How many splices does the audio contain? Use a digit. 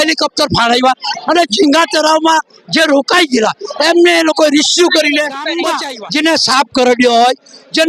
1